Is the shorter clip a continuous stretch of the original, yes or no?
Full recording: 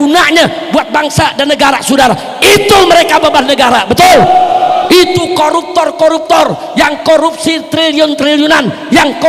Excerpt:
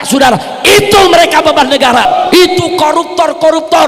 no